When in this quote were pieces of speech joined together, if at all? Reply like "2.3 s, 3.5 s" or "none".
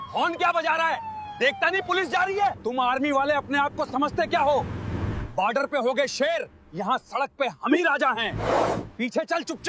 2.6 s

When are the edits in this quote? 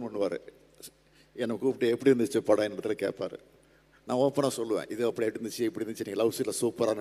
none

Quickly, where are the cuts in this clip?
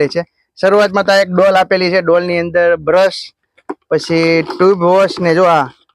none

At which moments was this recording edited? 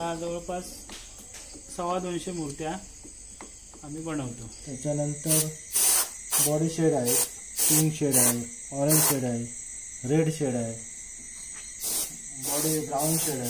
4.6 s

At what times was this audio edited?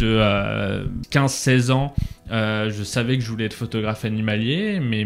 1.0 s

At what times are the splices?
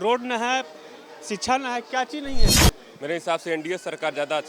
2.5 s

